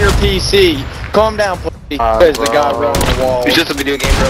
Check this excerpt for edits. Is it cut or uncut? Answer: cut